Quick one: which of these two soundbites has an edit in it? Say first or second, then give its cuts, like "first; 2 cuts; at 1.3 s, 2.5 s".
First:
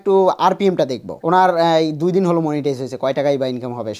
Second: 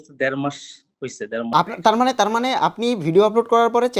second; 1 cut; at 1.5 s